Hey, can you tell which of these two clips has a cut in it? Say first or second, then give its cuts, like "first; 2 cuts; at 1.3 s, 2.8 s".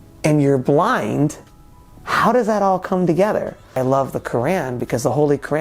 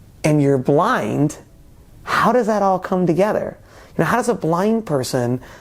first; 1 cut; at 3.8 s